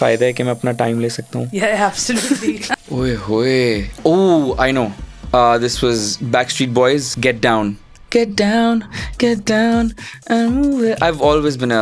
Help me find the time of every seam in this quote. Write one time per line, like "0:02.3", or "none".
0:02.6
0:07.1